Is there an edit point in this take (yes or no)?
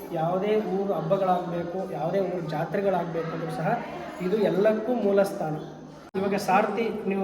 yes